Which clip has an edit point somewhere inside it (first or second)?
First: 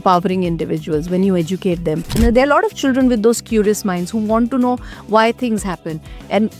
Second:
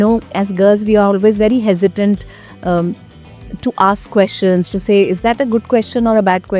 first